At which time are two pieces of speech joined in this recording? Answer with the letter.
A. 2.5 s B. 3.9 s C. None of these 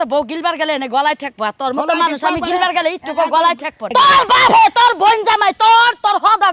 B